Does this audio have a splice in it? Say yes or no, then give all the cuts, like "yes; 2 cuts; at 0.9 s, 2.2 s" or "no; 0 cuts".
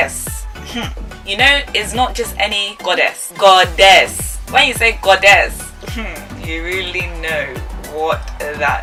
no; 0 cuts